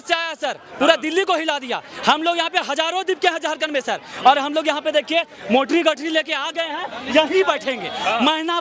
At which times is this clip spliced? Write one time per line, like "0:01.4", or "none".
none